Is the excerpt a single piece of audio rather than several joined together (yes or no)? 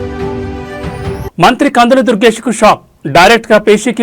no